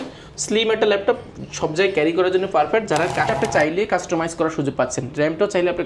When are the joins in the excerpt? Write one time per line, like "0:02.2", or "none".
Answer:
0:03.3